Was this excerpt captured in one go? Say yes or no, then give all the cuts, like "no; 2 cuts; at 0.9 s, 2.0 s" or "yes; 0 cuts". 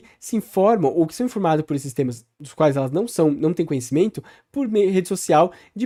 yes; 0 cuts